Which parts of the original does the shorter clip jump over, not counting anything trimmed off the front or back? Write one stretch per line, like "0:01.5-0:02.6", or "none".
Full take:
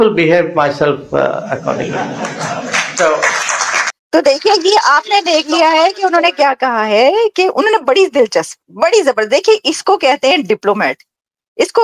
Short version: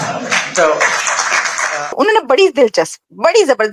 0:04.1-0:07.3